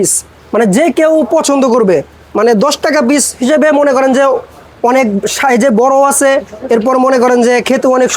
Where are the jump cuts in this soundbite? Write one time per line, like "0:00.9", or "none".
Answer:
none